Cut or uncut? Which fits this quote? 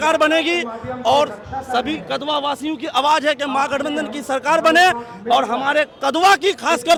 uncut